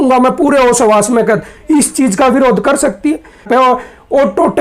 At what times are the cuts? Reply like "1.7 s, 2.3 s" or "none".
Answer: 3.5 s